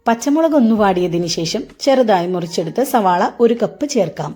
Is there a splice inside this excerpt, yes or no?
no